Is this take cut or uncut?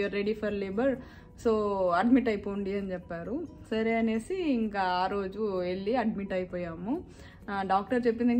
uncut